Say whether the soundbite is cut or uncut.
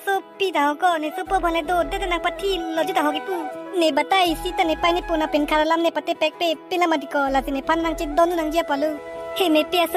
uncut